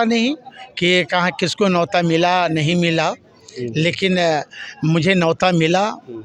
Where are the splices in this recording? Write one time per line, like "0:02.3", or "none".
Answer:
none